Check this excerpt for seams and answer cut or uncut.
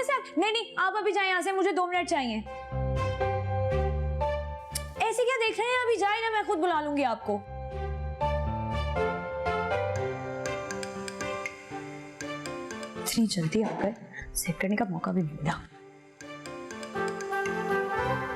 uncut